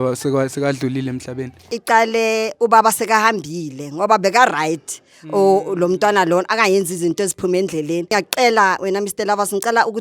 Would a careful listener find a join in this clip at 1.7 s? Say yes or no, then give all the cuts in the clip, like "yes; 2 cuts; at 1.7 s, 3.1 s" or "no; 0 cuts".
yes; 2 cuts; at 1.7 s, 8.1 s